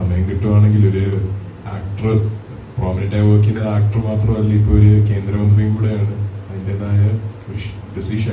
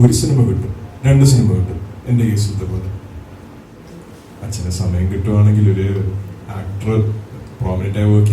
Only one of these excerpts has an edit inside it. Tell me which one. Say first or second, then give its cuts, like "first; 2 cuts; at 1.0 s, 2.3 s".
second; 1 cut; at 3.7 s